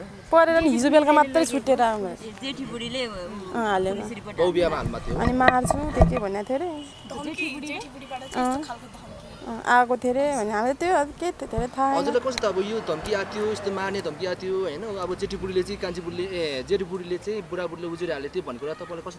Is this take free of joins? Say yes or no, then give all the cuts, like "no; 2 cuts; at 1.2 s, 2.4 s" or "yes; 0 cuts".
yes; 0 cuts